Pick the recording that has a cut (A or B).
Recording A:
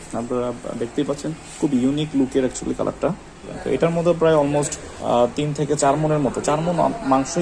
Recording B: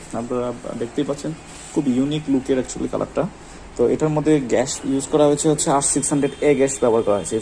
A